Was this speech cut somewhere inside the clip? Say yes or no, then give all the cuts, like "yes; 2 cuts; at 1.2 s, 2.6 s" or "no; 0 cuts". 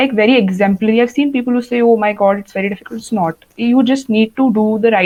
no; 0 cuts